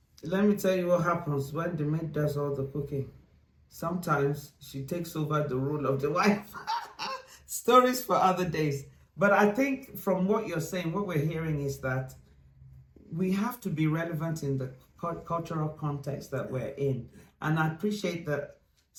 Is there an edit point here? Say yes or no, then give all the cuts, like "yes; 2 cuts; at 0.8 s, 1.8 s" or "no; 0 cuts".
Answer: no; 0 cuts